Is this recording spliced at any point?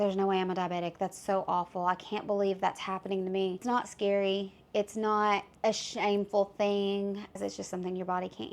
yes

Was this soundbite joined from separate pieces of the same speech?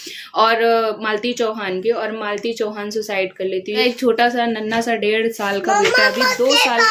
yes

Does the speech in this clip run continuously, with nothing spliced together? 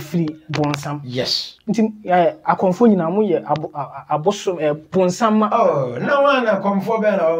no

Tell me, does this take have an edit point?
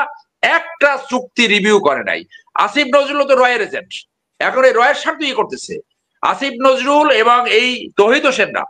no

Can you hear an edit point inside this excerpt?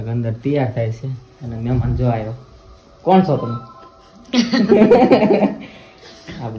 no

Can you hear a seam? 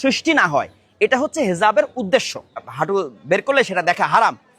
yes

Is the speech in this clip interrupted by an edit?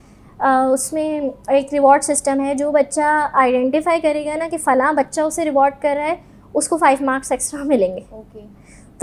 no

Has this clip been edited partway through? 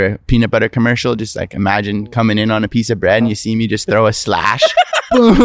no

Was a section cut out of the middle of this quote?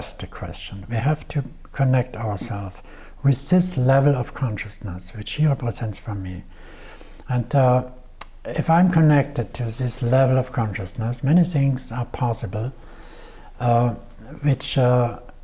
no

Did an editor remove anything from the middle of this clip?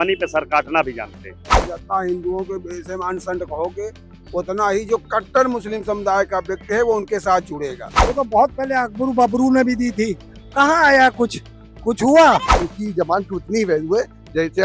yes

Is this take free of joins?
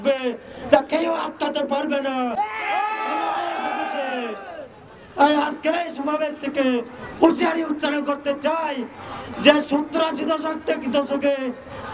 yes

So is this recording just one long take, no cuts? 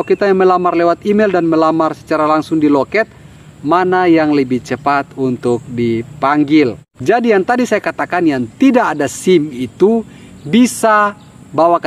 no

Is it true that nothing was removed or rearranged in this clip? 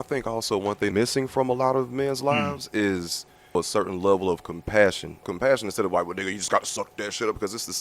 no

